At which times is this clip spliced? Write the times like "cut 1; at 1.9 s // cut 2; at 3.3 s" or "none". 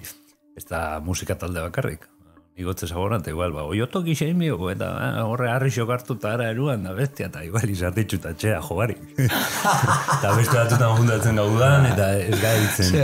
none